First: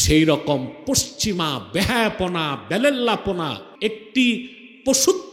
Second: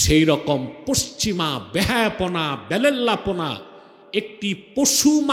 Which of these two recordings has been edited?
first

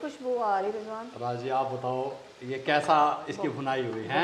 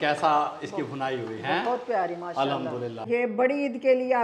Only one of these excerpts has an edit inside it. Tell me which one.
second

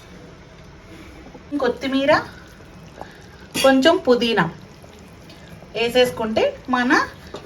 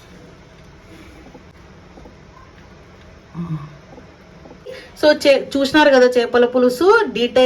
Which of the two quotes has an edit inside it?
first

